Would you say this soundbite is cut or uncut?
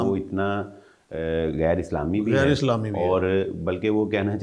uncut